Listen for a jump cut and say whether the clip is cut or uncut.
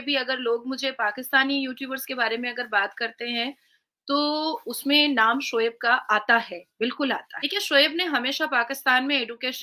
cut